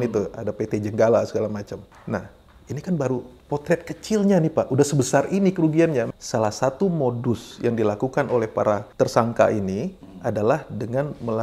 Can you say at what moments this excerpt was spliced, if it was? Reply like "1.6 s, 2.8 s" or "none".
1.9 s, 3.3 s, 6.1 s, 8.9 s

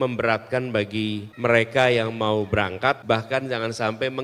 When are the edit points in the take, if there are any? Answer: 1.3 s, 3.0 s

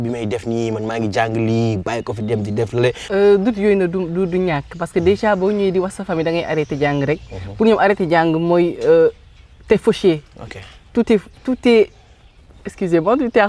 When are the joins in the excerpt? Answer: 3.0 s

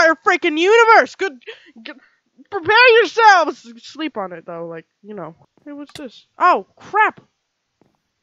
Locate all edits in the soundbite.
5.4 s

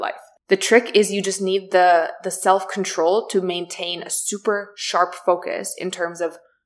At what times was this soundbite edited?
none

